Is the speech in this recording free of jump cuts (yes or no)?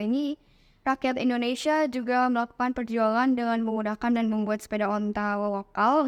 yes